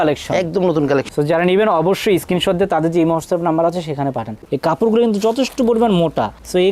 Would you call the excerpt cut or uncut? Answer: cut